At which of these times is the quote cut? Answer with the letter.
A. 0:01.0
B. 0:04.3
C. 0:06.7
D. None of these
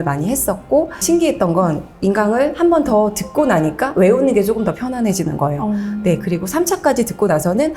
A